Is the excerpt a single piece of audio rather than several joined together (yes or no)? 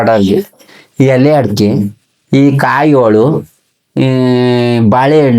yes